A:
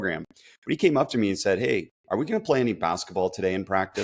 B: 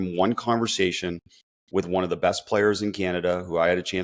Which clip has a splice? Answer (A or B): A